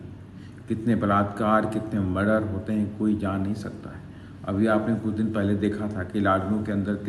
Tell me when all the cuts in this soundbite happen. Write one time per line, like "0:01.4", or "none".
none